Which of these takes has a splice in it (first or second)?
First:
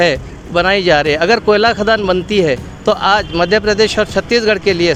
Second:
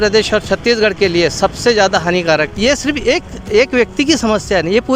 second